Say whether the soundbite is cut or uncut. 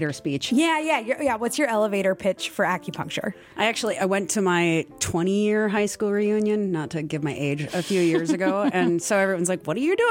uncut